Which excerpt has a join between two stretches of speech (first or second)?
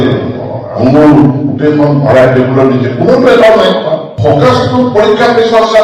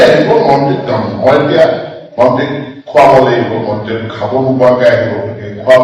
first